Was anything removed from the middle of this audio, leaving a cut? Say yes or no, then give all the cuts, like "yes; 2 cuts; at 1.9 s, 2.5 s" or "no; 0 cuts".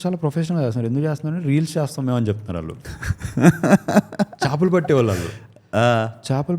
no; 0 cuts